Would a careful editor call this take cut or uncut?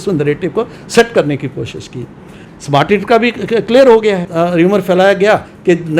cut